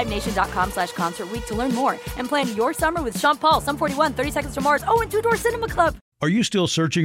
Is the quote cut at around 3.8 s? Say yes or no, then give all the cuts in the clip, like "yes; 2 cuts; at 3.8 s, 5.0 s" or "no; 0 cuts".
no; 1 cut; at 6.1 s